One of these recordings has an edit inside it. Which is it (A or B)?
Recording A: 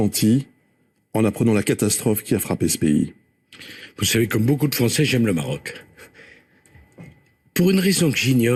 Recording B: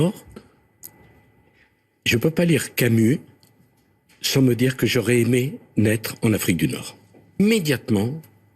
B